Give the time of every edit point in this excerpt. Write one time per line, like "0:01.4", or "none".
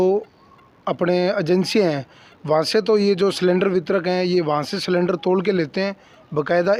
none